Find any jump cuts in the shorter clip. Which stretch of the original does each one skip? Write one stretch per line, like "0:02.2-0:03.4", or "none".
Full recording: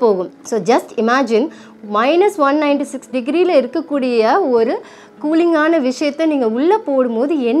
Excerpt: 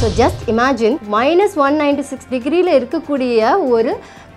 0:01.5-0:01.9